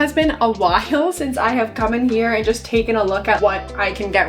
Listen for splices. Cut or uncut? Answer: cut